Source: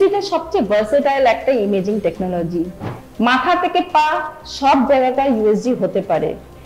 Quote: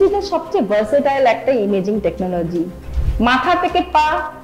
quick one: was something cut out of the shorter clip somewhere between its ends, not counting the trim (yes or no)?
no